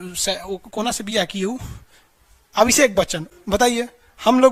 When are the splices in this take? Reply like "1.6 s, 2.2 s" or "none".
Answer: none